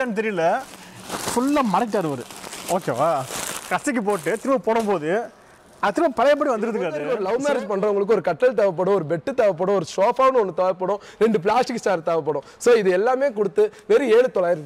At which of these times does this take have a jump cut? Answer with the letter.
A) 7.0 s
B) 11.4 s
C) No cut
A